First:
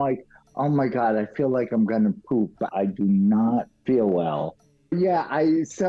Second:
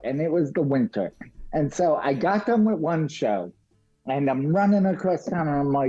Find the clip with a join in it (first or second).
first